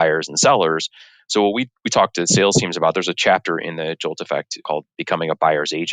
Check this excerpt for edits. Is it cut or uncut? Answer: cut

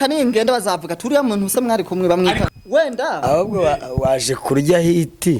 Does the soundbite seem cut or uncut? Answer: cut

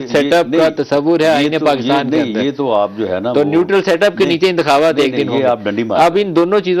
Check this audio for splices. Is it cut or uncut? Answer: uncut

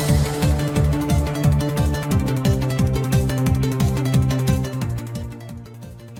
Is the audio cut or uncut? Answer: uncut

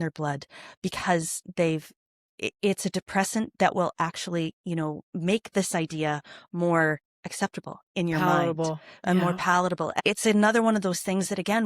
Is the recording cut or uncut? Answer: cut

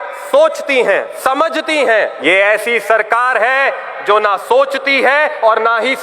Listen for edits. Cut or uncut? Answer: cut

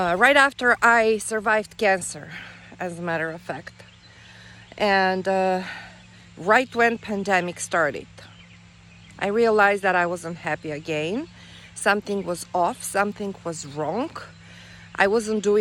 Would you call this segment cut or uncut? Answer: uncut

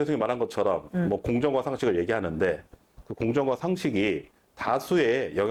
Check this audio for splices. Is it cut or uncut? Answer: uncut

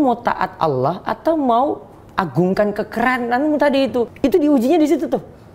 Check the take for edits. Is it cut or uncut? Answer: cut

